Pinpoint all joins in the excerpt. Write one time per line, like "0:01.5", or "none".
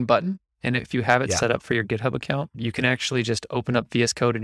0:00.9
0:02.5